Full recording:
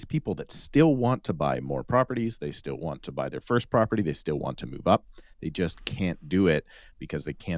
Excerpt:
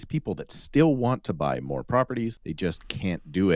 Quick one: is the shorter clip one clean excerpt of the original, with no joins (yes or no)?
no